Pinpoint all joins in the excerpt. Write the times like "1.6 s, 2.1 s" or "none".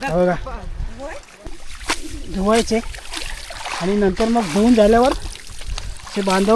1.5 s